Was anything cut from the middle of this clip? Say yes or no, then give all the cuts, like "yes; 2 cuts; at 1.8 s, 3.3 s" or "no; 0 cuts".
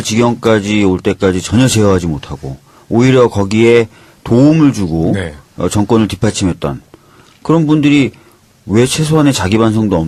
no; 0 cuts